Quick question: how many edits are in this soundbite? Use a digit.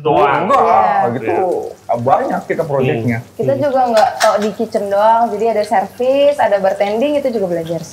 0